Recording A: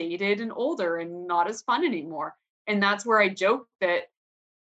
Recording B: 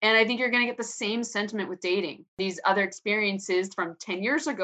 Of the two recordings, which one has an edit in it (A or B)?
B